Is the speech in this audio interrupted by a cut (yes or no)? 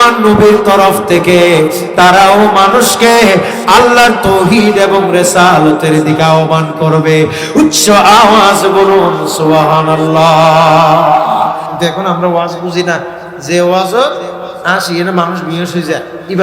yes